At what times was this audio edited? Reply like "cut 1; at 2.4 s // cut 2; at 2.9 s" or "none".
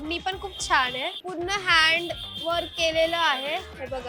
cut 1; at 1.2 s